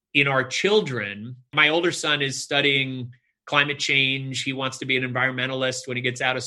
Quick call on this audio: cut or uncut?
cut